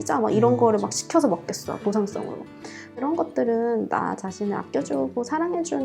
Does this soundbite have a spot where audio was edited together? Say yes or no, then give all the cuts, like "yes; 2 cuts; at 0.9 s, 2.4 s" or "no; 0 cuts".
yes; 1 cut; at 3.0 s